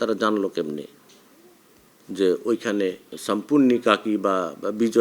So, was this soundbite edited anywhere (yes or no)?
yes